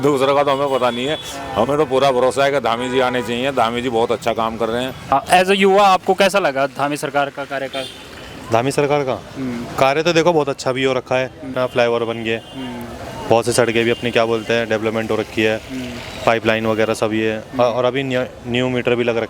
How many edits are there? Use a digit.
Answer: 1